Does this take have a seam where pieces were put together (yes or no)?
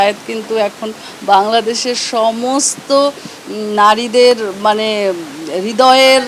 no